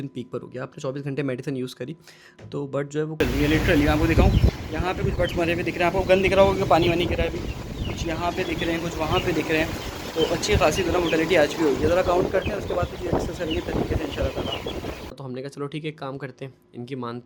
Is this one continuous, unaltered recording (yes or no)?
no